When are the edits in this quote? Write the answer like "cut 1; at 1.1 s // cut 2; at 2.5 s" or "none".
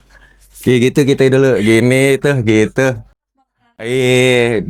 none